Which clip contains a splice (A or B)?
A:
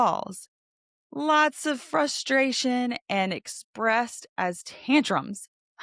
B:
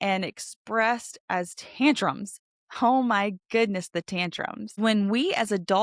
B